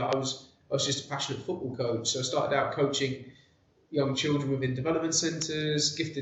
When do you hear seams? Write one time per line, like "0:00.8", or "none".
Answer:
none